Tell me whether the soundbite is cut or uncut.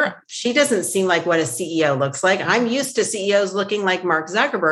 uncut